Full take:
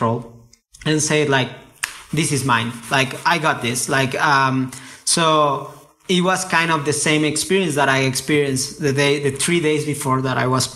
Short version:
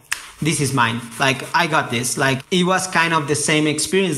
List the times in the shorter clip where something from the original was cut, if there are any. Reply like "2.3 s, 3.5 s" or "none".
2.4 s

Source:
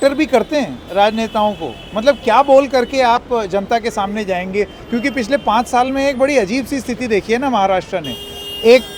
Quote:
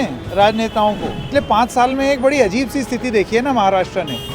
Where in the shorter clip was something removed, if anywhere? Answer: 1.3 s

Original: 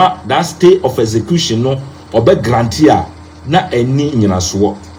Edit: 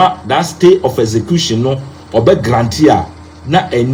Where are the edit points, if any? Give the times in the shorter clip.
none

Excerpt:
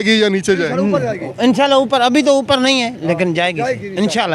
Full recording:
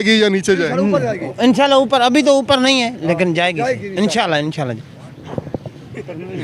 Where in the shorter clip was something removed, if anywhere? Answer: none

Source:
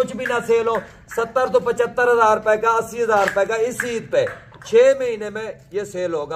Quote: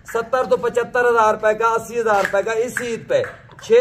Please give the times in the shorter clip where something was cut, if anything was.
none

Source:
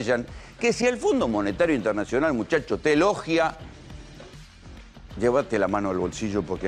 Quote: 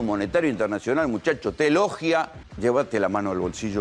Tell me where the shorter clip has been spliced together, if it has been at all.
2.4 s

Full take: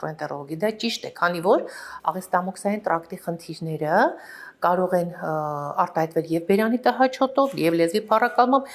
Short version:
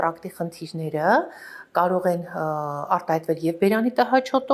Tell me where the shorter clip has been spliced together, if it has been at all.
none

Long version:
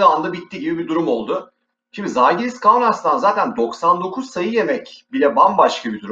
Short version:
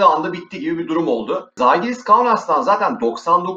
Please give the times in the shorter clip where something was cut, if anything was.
1.5 s

